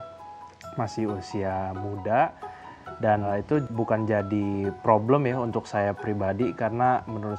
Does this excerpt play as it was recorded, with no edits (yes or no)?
no